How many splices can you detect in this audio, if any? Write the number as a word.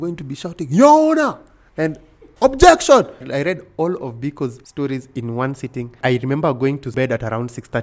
four